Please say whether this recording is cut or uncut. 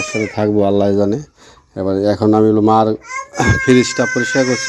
uncut